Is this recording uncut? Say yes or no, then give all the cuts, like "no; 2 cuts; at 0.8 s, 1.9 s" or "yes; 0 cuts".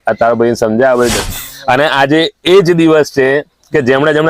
no; 1 cut; at 1.2 s